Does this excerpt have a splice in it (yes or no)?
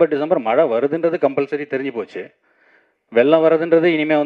no